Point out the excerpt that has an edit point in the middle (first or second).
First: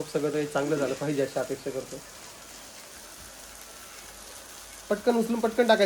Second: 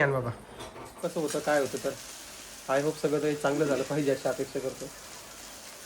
second